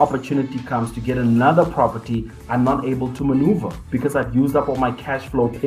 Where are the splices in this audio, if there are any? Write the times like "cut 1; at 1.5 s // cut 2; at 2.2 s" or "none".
none